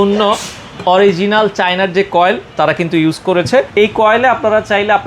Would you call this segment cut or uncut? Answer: cut